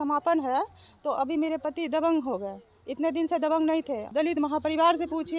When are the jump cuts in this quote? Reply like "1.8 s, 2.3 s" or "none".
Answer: 4.0 s